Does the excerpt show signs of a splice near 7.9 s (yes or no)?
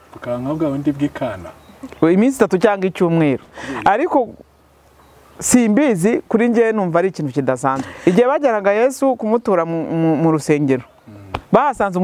yes